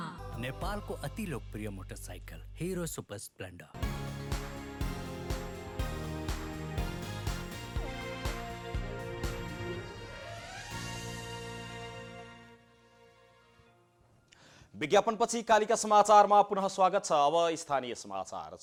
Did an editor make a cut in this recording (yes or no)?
no